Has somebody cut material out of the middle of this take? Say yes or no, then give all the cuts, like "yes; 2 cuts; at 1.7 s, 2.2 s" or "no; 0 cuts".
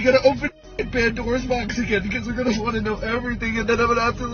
no; 0 cuts